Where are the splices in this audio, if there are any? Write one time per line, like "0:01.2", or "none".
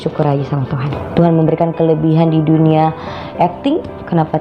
0:01.0